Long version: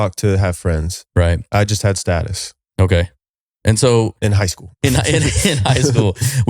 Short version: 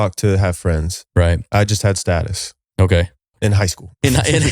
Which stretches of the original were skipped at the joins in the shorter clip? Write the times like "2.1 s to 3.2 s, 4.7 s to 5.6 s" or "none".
3.3 s to 4.1 s